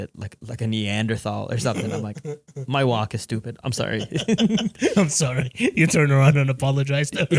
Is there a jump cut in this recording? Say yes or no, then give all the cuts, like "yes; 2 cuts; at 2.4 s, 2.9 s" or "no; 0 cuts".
no; 0 cuts